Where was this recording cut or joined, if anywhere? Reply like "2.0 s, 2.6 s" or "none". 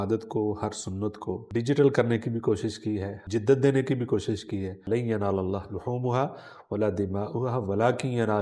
1.4 s, 3.2 s, 4.8 s